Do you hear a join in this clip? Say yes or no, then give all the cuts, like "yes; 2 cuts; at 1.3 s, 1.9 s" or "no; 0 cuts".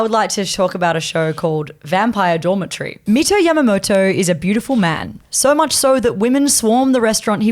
yes; 1 cut; at 3.0 s